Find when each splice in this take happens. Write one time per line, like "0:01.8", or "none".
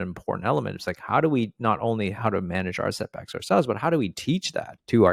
none